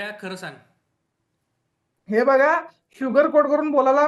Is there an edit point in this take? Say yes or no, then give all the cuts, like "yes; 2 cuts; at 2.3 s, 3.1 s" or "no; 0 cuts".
no; 0 cuts